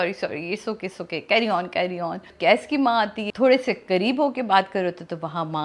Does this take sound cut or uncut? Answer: cut